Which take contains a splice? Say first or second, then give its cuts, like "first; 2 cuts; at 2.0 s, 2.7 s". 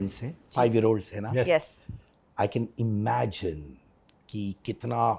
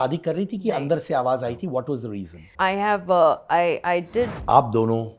second; 2 cuts; at 2.5 s, 4.4 s